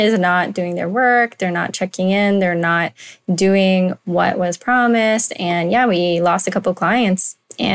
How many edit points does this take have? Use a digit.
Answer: 0